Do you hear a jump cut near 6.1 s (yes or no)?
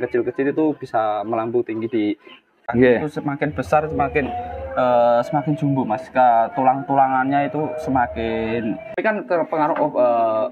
no